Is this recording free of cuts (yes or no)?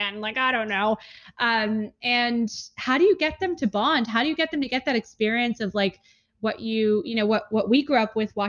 yes